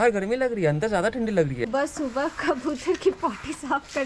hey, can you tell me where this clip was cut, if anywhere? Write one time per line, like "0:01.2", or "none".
0:01.7